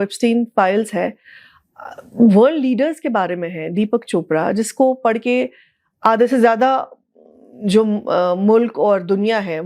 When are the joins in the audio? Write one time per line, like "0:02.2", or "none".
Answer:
none